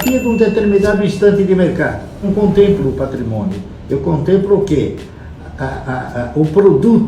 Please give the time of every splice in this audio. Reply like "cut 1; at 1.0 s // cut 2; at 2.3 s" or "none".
cut 1; at 2.3 s